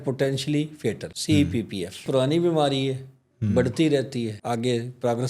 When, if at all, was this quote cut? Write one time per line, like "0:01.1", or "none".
0:01.1
0:02.1
0:04.4